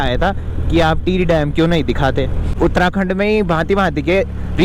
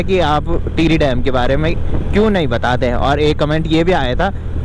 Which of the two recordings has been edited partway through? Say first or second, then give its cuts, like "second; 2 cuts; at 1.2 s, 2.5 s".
first; 1 cut; at 2.5 s